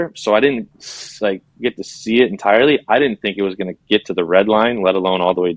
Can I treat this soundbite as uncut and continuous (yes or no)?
yes